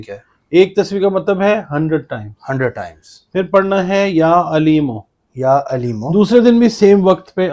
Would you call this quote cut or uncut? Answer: cut